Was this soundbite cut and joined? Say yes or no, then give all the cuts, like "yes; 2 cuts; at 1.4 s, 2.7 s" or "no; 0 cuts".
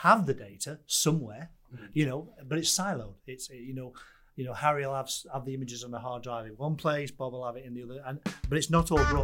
no; 0 cuts